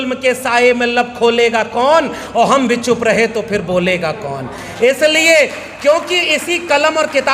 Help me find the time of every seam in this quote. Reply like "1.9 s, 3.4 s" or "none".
none